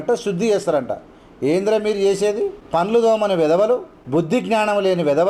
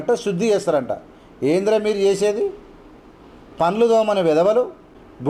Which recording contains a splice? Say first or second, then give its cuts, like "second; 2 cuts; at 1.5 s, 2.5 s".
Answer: first; 2 cuts; at 2.6 s, 3.9 s